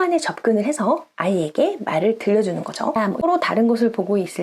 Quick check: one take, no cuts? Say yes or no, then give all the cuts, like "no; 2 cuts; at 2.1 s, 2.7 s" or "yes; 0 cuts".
no; 1 cut; at 3.1 s